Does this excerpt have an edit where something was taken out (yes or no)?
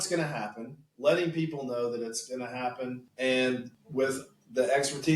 yes